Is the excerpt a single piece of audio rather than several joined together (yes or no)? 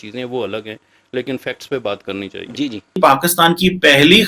no